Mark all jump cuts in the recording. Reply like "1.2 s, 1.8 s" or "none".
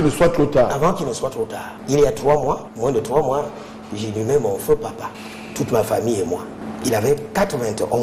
none